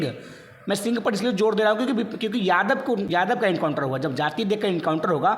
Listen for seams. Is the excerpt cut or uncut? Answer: cut